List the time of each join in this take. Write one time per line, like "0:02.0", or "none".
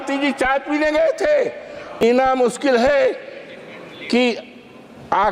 0:02.0